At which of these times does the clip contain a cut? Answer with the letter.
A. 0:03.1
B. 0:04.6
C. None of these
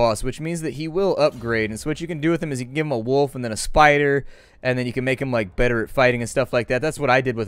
A